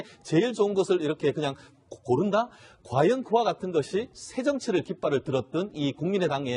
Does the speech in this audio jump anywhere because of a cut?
no; 0 cuts

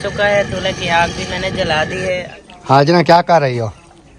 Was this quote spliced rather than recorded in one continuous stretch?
yes; 1 cut; at 2.3 s

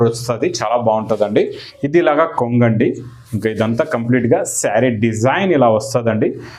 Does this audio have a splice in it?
yes; 1 cut; at 1.6 s

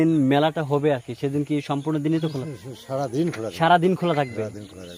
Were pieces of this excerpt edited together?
no; 0 cuts

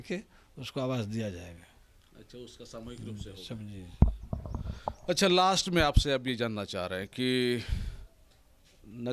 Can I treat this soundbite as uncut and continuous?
yes; 0 cuts

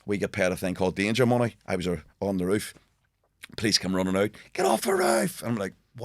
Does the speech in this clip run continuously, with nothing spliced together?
yes; 0 cuts

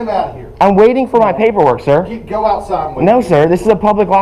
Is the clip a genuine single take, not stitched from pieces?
yes; 0 cuts

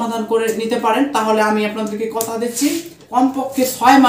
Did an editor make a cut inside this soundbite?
yes; 1 cut; at 3.0 s

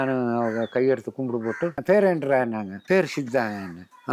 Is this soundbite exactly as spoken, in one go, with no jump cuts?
no; 1 cut; at 1.8 s

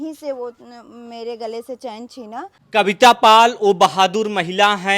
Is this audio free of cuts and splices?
no; 1 cut; at 2.6 s

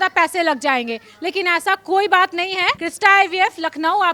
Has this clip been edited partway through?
yes; 1 cut; at 2.8 s

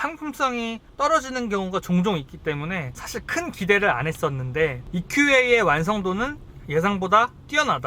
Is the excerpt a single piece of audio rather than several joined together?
yes; 0 cuts

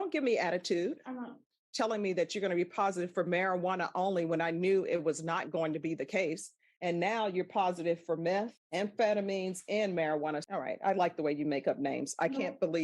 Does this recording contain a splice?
yes; 2 cuts; at 1.6 s, 10.4 s

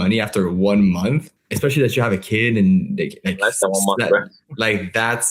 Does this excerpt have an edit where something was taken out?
yes; 1 cut; at 1.4 s

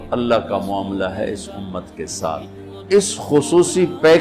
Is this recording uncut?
yes; 0 cuts

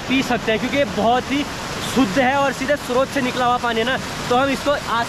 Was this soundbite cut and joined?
no; 0 cuts

